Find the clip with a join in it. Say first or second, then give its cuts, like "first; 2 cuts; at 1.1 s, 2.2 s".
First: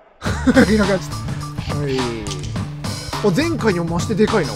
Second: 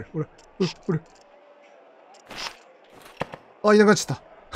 first; 1 cut; at 2.9 s